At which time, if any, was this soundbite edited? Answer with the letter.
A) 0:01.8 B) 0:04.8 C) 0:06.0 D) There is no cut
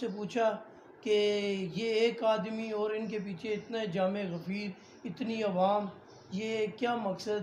D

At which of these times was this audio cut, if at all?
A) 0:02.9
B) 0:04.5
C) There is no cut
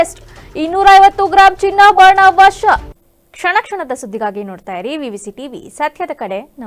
C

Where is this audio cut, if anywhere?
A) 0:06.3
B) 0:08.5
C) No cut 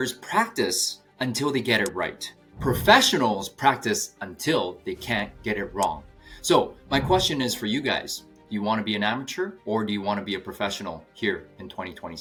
C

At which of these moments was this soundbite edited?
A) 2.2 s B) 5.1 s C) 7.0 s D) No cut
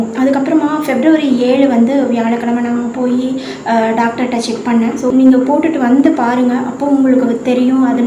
B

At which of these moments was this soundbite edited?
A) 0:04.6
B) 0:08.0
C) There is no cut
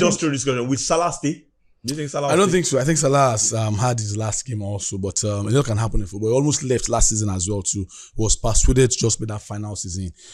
C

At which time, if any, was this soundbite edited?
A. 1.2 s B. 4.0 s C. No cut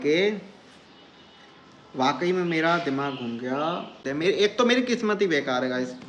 B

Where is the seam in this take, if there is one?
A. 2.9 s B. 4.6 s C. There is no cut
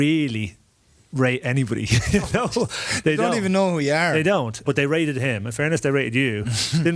B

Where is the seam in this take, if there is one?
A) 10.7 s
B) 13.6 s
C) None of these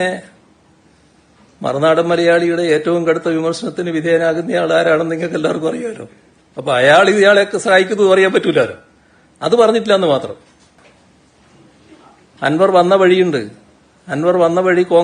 A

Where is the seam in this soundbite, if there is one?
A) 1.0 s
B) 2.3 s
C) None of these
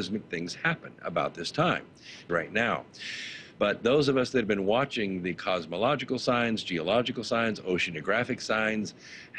B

